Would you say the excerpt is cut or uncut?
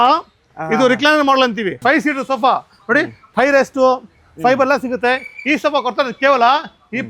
cut